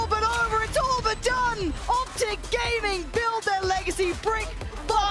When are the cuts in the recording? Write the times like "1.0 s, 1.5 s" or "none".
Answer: 1.8 s

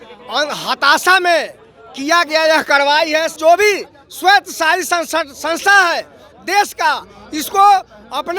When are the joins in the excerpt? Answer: 3.4 s

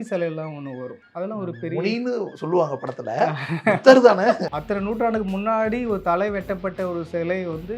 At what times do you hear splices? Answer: 1.0 s, 4.4 s

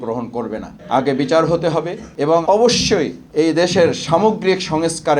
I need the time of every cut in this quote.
2.2 s

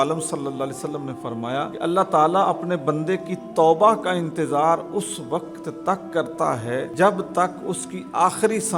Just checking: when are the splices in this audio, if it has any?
1.7 s, 6.9 s

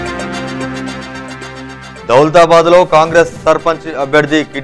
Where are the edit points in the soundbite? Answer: 1.8 s

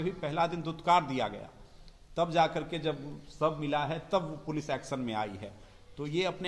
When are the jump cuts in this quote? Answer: none

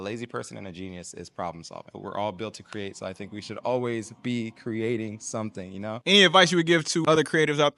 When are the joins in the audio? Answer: 1.9 s, 6.0 s, 7.0 s

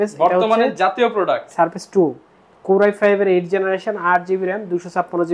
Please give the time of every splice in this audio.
none

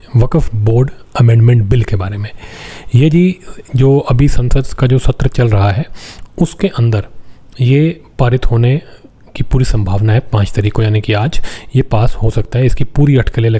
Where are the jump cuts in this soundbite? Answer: none

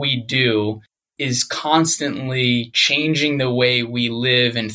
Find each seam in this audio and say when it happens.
none

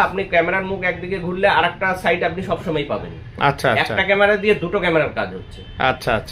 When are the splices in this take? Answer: none

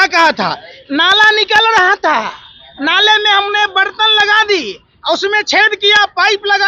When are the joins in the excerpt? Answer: none

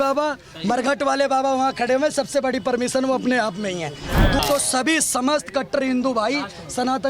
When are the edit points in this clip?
4.4 s

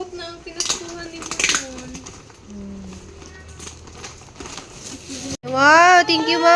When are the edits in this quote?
5.4 s

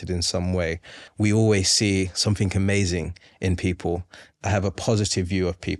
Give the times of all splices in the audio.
1.0 s, 4.2 s

